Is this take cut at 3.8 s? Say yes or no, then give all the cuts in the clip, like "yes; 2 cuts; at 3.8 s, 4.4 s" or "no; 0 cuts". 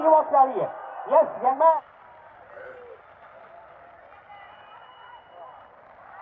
no; 1 cut; at 1.7 s